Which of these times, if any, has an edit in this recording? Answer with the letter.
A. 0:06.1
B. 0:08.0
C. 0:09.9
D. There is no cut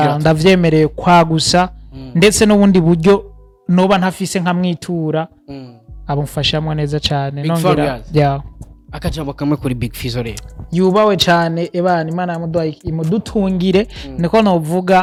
D